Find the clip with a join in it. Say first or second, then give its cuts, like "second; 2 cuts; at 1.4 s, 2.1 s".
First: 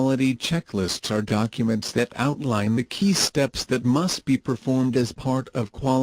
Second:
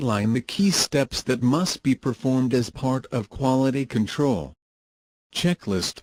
first; 1 cut; at 1.0 s